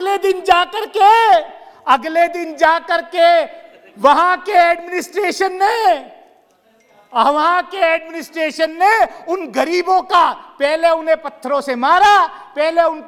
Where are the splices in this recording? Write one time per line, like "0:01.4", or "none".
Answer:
none